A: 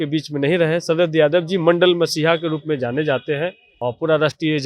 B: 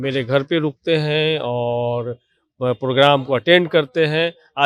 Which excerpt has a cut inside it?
A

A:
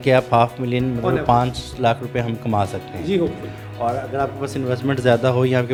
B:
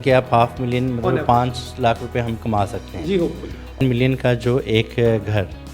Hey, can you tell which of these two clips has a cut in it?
B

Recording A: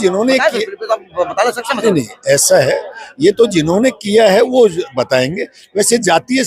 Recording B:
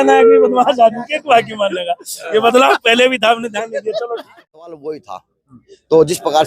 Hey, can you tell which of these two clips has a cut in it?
B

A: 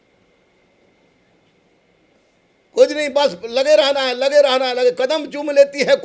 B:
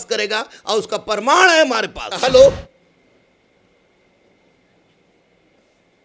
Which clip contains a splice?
B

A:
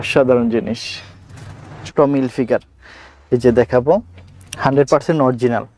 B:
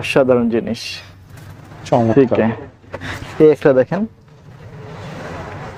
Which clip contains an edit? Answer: A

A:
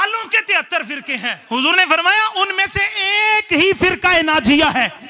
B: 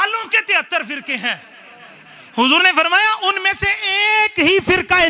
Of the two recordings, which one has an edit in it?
A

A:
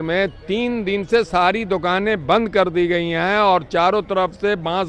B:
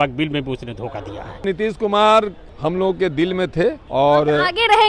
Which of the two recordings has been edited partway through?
B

